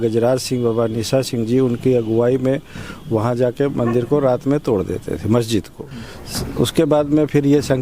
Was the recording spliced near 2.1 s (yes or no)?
no